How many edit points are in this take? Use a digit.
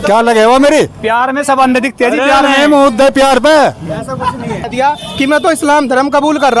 1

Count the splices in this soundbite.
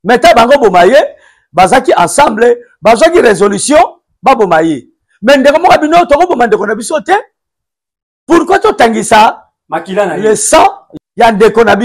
1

